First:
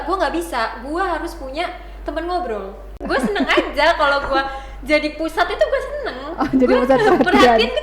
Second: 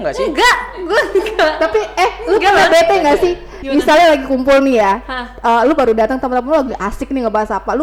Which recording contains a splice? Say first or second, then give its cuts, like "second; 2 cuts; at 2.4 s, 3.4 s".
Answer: first; 1 cut; at 2.9 s